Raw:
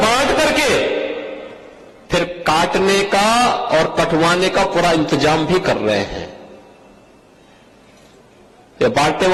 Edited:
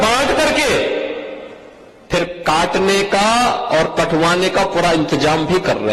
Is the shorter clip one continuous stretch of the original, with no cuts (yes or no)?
yes